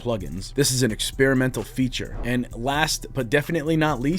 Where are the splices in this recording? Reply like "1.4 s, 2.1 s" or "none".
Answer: 2.1 s